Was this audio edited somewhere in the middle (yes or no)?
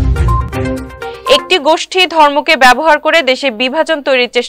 yes